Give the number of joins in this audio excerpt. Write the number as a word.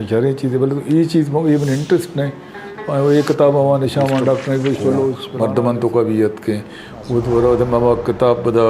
one